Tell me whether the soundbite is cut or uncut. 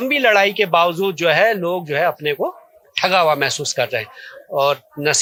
uncut